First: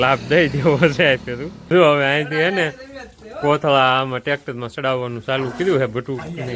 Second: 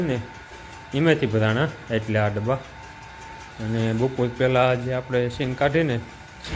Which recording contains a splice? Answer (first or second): first